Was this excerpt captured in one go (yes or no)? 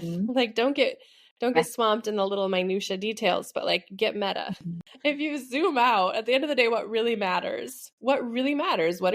no